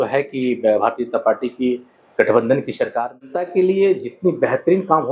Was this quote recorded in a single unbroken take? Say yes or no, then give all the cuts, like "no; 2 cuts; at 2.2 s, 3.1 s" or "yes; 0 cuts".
no; 1 cut; at 3.4 s